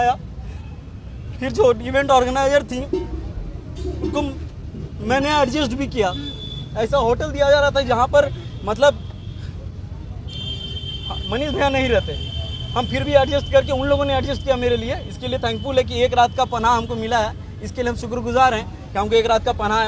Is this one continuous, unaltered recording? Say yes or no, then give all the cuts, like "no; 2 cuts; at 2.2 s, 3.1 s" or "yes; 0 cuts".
yes; 0 cuts